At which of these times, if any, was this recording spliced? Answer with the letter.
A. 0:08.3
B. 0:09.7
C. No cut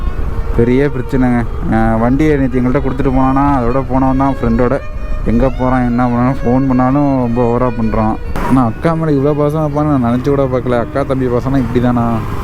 A